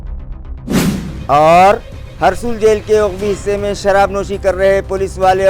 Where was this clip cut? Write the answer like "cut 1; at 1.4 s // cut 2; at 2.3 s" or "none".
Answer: none